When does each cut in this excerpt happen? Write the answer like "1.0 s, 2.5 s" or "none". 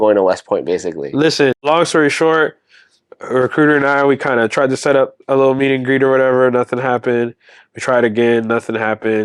1.6 s